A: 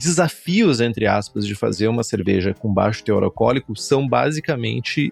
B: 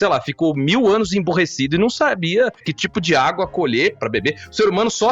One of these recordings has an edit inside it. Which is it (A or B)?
B